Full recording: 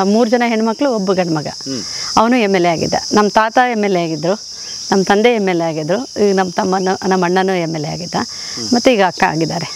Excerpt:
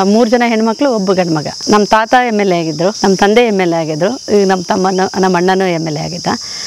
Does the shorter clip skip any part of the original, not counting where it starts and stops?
yes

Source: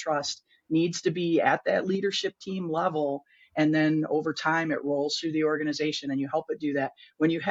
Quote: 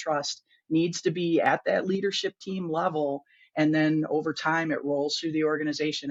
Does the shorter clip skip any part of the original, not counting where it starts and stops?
no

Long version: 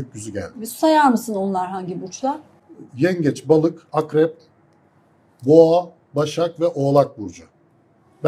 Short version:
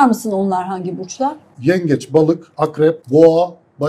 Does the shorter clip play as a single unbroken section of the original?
no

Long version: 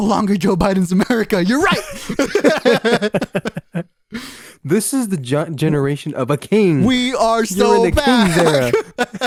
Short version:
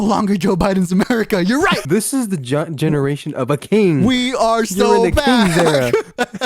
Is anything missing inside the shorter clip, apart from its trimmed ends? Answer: yes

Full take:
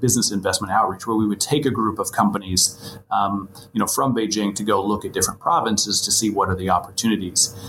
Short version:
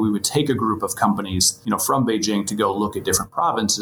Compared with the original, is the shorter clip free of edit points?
no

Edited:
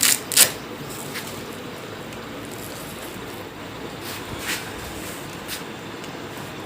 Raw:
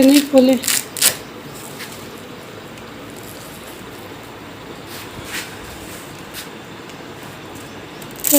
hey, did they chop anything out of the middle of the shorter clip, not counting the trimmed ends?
yes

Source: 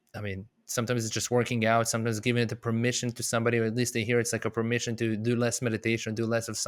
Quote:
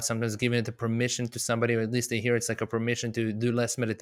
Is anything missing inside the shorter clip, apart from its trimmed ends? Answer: no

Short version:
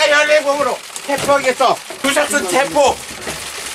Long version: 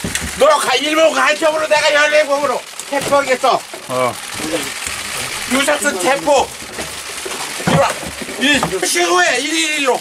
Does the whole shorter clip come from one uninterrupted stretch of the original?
no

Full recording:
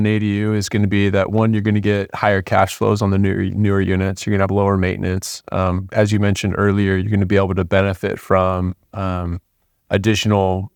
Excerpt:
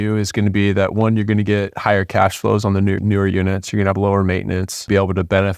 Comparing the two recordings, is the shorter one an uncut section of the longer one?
no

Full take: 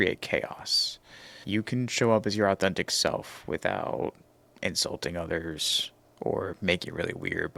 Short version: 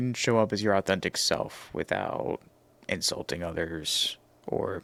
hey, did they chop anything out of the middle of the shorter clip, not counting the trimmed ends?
no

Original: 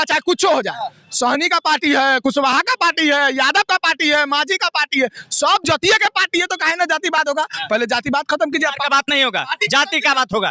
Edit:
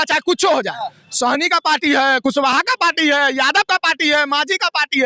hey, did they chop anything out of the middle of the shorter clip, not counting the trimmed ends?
no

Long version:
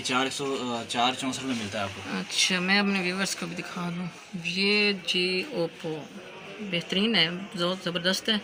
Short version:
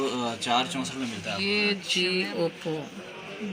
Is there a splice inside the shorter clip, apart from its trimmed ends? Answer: yes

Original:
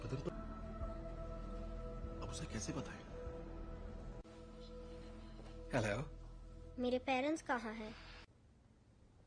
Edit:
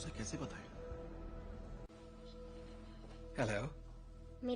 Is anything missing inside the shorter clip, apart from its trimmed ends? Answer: no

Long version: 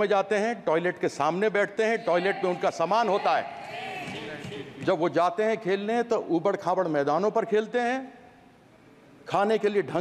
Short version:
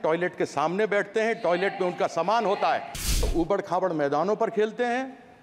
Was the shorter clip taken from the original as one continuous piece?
no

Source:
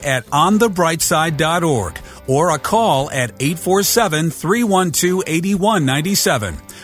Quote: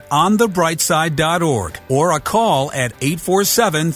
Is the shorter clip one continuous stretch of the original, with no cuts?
no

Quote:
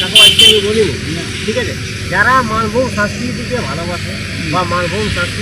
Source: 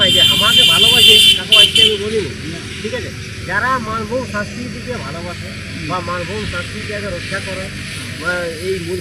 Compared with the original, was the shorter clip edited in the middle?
no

